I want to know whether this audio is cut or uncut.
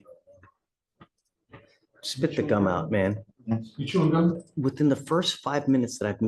cut